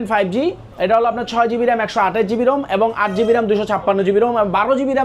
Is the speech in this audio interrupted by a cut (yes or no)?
no